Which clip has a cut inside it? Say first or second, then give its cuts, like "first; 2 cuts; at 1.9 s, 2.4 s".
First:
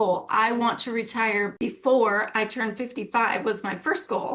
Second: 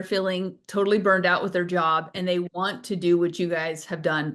first; 1 cut; at 1.5 s